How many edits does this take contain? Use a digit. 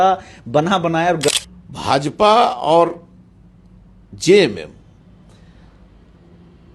1